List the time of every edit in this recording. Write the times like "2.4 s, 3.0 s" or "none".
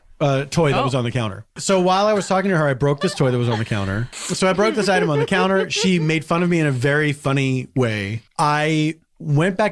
1.5 s, 4.1 s, 8.2 s